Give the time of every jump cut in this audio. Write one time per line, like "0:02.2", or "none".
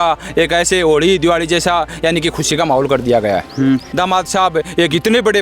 0:03.9